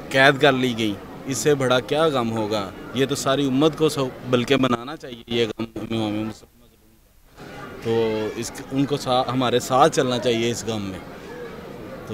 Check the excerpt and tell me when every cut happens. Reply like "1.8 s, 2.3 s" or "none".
none